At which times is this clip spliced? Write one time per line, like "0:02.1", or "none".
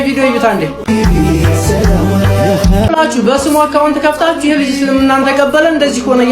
0:02.9